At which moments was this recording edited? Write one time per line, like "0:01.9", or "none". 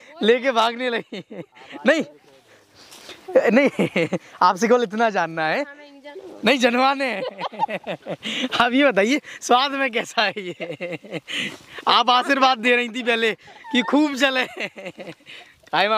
none